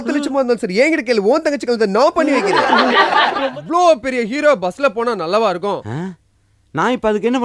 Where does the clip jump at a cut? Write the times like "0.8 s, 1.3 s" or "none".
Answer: 3.5 s